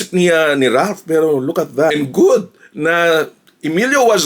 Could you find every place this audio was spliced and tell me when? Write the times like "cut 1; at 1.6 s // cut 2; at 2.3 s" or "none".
cut 1; at 1.9 s

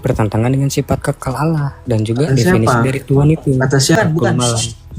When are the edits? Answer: cut 1; at 4.0 s

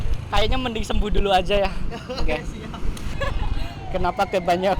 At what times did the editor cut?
cut 1; at 3.2 s

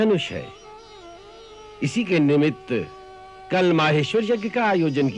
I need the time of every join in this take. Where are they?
none

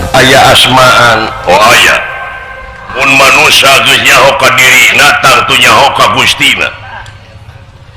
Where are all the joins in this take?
cut 1; at 2.9 s

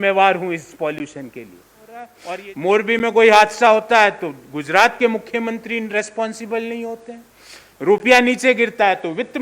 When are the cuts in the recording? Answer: cut 1; at 2.2 s

